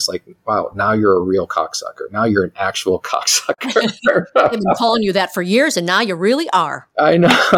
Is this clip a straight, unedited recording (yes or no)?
yes